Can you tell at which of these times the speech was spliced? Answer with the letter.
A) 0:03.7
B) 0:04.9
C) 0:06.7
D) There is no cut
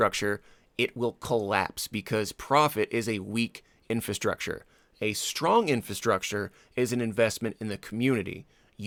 D